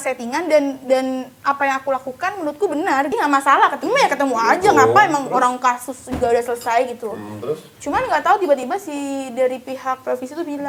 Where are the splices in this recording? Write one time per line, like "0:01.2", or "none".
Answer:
0:03.1